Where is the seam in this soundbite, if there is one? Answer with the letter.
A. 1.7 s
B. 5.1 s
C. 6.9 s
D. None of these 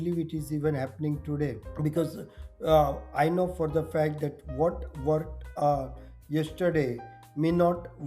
A